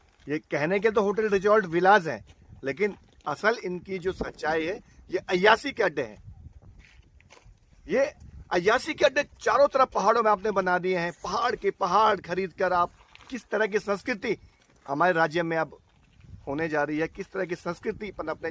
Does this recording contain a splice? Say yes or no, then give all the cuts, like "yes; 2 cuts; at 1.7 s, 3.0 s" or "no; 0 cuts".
no; 0 cuts